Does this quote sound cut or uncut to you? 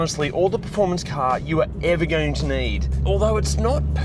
cut